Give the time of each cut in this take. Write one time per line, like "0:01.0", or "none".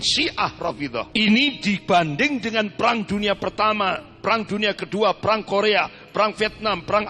0:01.1